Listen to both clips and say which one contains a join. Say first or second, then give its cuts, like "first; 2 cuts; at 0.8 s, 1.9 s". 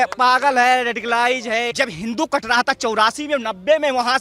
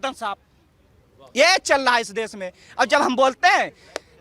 first; 1 cut; at 1.7 s